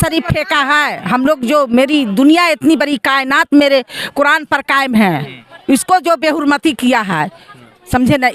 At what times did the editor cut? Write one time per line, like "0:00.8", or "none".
none